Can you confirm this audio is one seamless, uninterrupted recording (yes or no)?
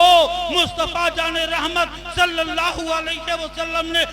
yes